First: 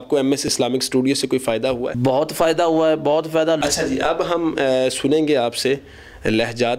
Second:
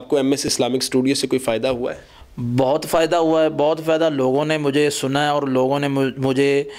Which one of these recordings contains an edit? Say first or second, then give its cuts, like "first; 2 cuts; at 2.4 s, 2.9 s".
first; 2 cuts; at 1.9 s, 3.6 s